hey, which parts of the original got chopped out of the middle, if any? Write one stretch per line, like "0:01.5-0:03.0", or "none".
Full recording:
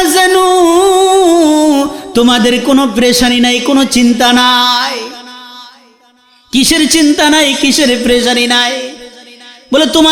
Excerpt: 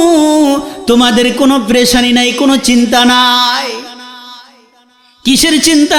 none